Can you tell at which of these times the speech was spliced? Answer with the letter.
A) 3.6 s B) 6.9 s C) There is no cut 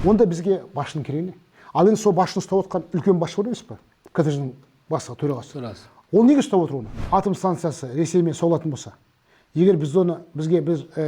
B